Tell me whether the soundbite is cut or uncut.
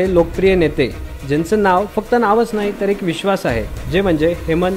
uncut